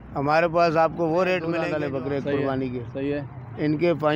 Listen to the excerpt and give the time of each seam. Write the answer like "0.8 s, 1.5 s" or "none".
1.5 s